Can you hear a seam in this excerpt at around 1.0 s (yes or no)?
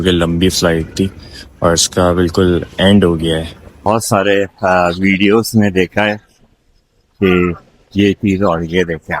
no